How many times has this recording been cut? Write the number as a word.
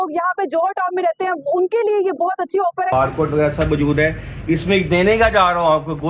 one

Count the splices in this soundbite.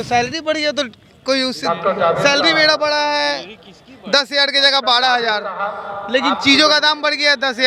zero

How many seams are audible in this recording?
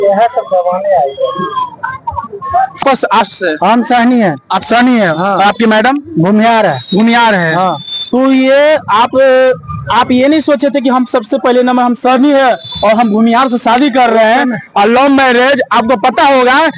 zero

